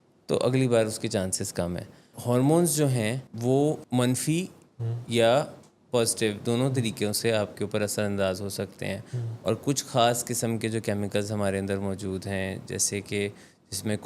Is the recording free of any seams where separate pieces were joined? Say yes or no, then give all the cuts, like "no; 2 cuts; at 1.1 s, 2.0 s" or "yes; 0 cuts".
no; 3 cuts; at 2.1 s, 3.3 s, 3.8 s